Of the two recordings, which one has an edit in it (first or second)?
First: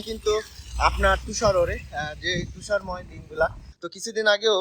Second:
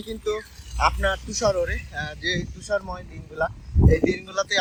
first